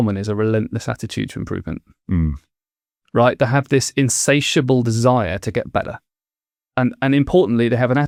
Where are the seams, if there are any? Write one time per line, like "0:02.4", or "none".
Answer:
none